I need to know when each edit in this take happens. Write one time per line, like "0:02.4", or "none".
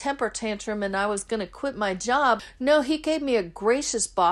0:02.5